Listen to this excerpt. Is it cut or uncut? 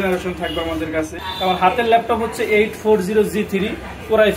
cut